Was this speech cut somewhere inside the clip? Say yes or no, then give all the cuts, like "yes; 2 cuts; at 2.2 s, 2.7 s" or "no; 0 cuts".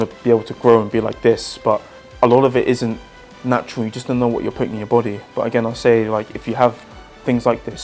yes; 2 cuts; at 2.0 s, 5.2 s